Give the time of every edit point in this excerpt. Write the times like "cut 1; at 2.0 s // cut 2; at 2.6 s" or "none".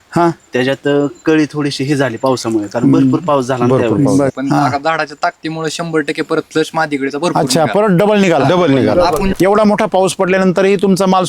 cut 1; at 4.3 s // cut 2; at 9.3 s